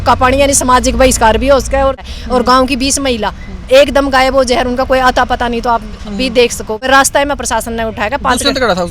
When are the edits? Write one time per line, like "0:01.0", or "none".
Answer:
0:02.0
0:06.9